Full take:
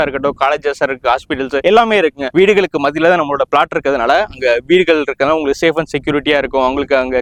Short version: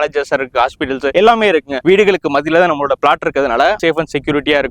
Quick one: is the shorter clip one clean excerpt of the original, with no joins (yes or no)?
no